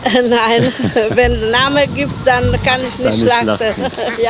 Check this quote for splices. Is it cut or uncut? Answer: uncut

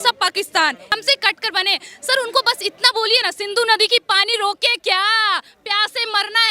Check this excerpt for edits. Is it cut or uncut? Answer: cut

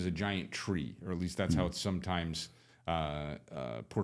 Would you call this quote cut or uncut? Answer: uncut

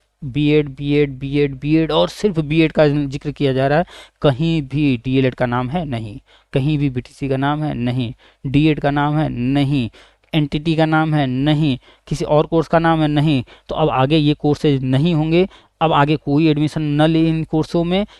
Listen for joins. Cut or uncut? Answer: uncut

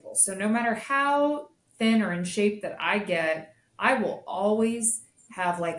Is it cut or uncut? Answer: uncut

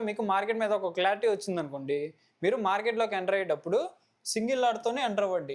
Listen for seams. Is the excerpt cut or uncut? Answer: uncut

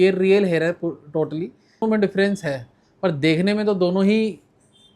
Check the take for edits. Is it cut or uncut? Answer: cut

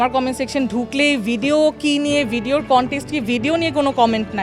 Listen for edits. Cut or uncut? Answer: uncut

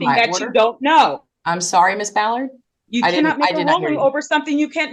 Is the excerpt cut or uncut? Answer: uncut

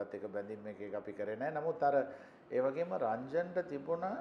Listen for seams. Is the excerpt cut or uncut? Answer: uncut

